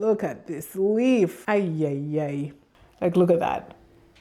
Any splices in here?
yes; 2 cuts; at 1.4 s, 2.6 s

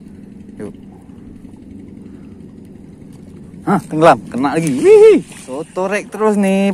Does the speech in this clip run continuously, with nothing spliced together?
no; 1 cut; at 5.7 s

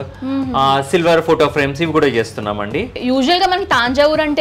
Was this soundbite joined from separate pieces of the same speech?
yes; 1 cut; at 2.9 s

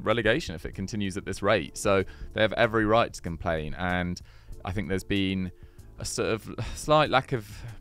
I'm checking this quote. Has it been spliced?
no; 0 cuts

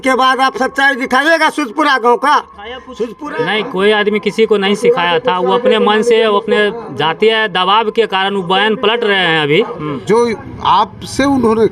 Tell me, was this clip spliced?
yes; 2 cuts; at 2.9 s, 9.9 s

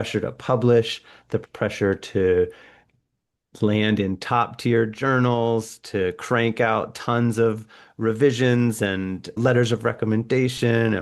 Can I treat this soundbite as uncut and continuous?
no; 1 cut; at 1.4 s

